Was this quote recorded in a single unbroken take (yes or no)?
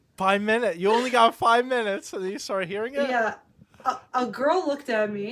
yes